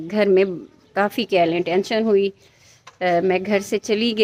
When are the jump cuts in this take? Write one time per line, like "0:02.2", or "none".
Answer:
none